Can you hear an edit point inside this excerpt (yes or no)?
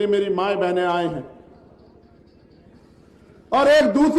yes